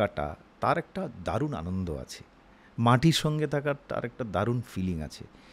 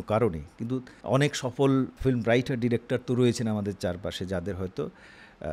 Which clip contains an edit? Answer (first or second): second